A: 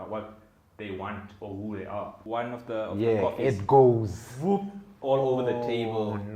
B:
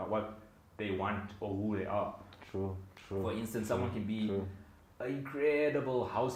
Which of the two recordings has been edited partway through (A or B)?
A